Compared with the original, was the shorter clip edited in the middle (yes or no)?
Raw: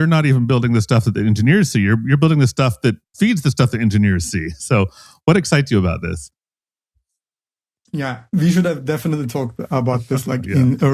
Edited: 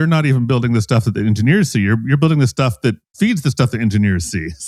no